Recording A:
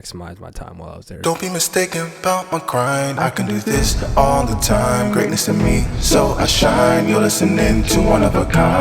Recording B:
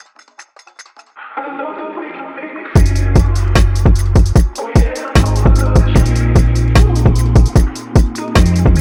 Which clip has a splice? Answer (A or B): A